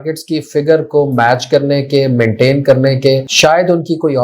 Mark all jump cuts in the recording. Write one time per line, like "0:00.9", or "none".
0:03.3